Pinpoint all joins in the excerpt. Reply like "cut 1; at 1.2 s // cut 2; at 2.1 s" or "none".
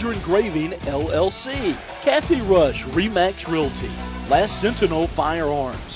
cut 1; at 1.9 s